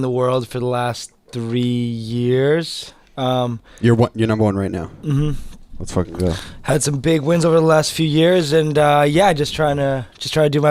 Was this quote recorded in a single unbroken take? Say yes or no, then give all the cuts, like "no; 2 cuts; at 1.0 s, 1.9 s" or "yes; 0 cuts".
yes; 0 cuts